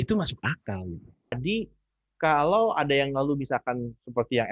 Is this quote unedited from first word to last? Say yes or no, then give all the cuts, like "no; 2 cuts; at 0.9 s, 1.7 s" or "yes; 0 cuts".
no; 1 cut; at 1.3 s